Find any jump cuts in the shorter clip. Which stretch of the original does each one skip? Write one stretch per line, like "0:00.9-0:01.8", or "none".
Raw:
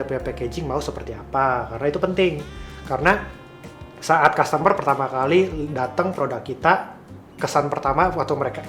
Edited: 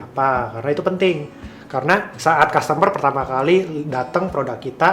0:03.3-0:03.9